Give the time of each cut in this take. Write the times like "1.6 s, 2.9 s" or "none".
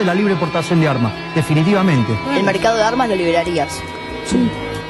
none